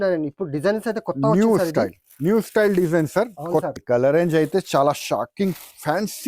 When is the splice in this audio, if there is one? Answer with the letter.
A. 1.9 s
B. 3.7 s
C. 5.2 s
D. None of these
B